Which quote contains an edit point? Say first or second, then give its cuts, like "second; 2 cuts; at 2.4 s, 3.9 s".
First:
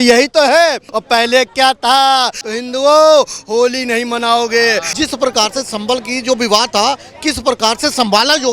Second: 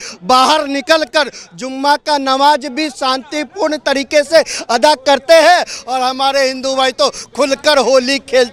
first; 3 cuts; at 0.9 s, 2.4 s, 4.9 s